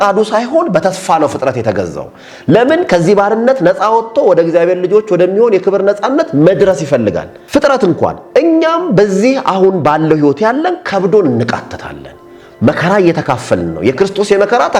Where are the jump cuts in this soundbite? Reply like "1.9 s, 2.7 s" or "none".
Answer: 7.3 s